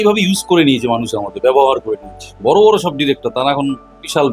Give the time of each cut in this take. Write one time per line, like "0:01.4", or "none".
none